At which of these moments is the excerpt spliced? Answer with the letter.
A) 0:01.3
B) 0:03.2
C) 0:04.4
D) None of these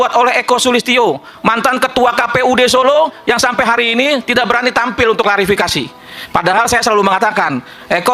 D